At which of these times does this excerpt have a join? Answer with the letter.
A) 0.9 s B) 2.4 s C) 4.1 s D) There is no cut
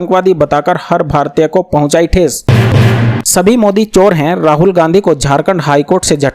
B